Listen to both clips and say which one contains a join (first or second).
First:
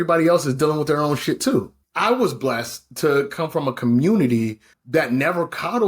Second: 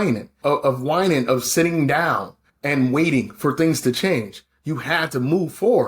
first